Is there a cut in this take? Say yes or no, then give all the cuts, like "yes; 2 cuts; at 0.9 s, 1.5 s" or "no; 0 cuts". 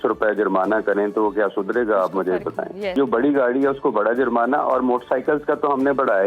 yes; 1 cut; at 2.9 s